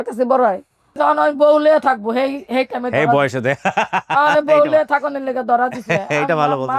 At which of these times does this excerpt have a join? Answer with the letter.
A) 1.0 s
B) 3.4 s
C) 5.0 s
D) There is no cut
A